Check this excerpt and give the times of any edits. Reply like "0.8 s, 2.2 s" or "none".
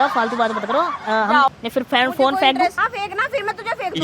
1.5 s, 2.8 s